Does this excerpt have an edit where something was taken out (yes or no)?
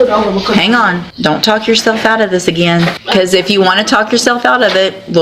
yes